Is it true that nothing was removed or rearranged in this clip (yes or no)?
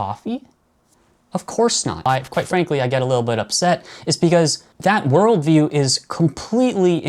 no